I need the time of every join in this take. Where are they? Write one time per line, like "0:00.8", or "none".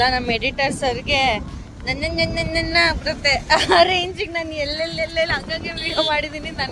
none